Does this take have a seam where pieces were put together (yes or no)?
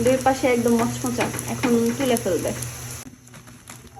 no